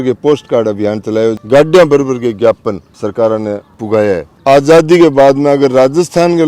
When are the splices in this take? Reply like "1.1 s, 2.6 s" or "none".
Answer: 1.4 s, 4.3 s